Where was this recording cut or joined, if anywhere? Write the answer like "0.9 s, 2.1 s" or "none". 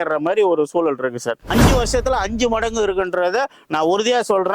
1.4 s

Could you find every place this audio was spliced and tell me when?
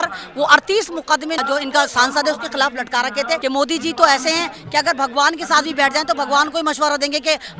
1.4 s, 3.4 s

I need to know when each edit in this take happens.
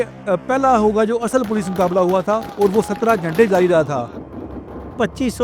2.5 s, 4.7 s

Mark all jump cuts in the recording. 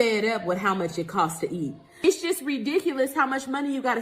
1.9 s

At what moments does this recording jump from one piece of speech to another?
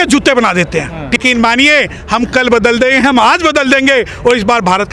1.2 s

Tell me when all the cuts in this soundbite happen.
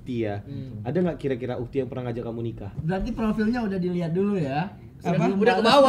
2.7 s

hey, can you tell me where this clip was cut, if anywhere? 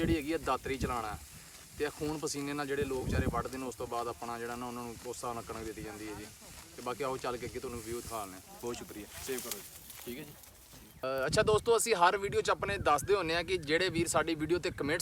none

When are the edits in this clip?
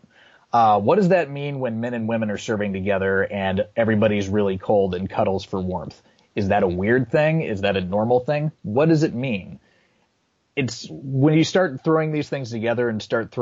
none

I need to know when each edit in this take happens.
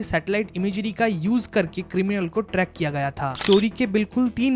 3.4 s

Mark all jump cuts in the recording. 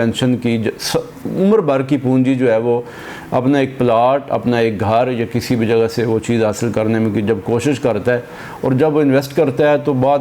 none

